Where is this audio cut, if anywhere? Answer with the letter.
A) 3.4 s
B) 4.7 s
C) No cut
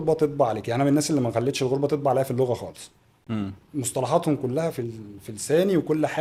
C